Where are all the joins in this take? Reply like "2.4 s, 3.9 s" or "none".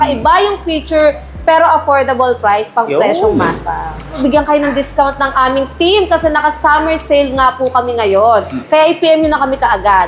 4.1 s